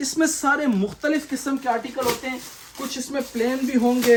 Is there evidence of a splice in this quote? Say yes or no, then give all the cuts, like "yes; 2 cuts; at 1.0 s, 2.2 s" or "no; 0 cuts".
no; 0 cuts